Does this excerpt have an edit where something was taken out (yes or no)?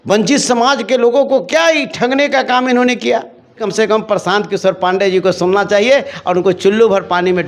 yes